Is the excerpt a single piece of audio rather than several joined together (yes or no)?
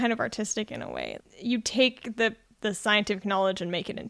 no